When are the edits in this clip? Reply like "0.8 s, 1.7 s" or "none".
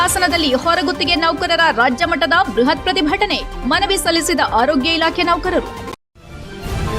5.8 s

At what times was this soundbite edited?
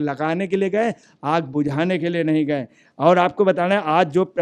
none

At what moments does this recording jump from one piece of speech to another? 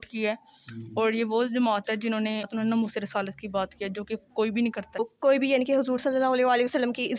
2.5 s, 5.1 s

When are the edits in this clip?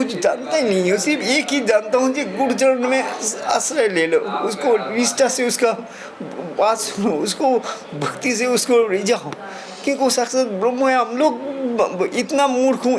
none

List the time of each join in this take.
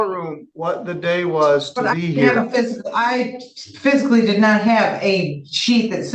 none

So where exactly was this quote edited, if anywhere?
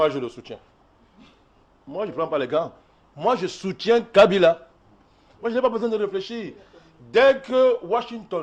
none

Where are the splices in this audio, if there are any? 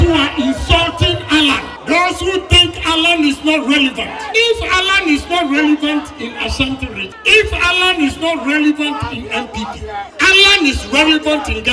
1.7 s, 4.2 s, 7.1 s, 10.1 s

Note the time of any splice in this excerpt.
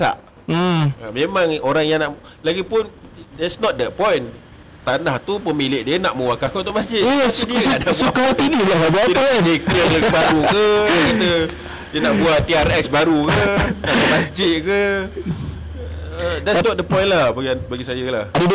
none

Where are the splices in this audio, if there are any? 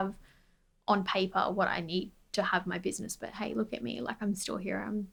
none

